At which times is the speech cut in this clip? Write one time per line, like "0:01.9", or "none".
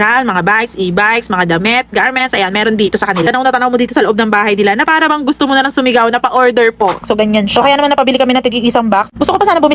0:03.2
0:07.0